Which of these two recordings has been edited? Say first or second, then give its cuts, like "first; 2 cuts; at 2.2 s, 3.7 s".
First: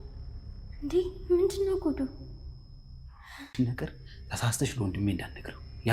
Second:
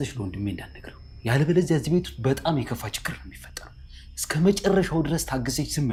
first; 1 cut; at 3.5 s